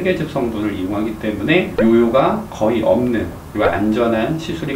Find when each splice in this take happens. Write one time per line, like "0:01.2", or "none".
0:03.4